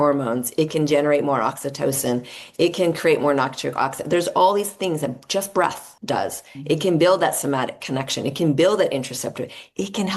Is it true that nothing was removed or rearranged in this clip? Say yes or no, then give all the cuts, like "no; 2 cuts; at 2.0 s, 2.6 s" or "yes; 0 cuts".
no; 1 cut; at 5.9 s